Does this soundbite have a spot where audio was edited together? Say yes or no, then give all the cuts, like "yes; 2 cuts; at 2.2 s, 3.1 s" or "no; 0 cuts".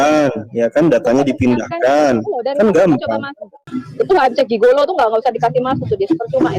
yes; 1 cut; at 3.6 s